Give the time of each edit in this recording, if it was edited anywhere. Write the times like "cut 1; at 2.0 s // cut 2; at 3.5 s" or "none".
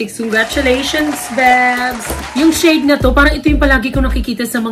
cut 1; at 2.2 s